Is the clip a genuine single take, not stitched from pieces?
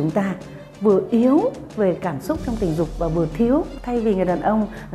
no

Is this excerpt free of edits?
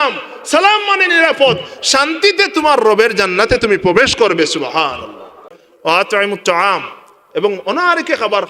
no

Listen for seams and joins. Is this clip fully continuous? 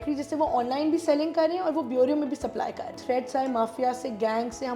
no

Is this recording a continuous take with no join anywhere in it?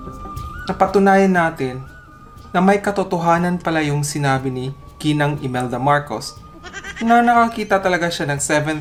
yes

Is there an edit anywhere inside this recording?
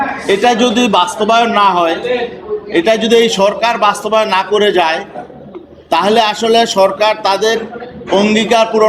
no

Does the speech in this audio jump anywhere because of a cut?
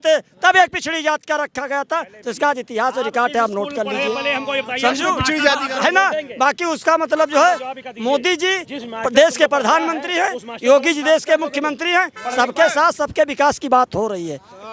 no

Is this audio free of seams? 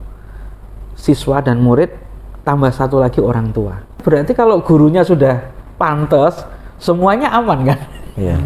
no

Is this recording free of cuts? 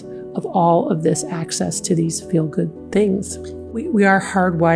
no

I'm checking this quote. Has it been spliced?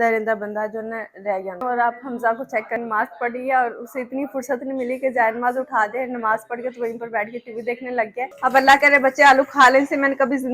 yes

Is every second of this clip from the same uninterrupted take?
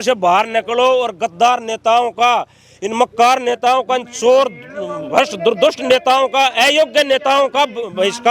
yes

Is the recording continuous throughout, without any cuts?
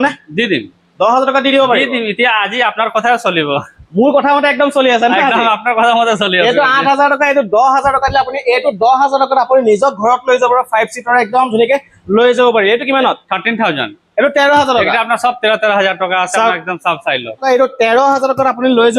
yes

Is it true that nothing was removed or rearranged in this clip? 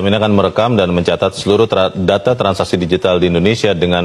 yes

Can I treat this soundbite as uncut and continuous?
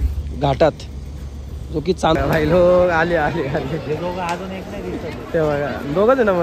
no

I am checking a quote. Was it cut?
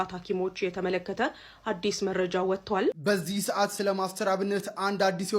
yes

